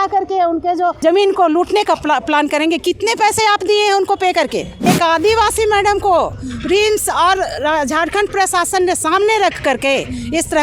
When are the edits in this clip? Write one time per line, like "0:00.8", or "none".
0:01.0
0:04.8